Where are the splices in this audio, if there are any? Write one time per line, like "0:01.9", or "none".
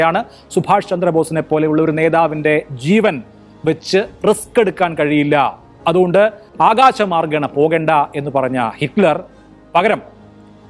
0:06.4